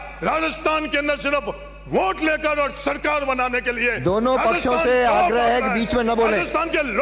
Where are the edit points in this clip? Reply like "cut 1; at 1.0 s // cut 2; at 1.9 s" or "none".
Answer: none